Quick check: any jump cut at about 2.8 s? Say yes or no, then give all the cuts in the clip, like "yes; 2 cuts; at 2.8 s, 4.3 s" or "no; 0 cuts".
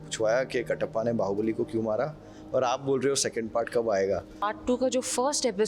no; 1 cut; at 4.5 s